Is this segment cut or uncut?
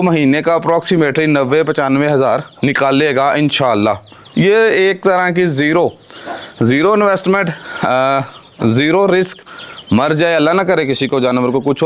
uncut